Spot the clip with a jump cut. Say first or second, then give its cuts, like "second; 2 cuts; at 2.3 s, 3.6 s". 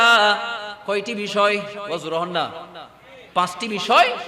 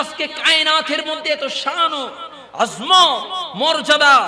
first; 1 cut; at 1.8 s